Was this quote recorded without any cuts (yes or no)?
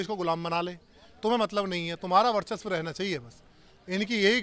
yes